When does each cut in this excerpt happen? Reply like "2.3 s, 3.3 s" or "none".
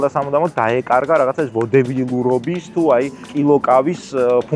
3.3 s